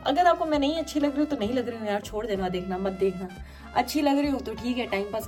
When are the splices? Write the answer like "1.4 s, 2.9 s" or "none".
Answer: none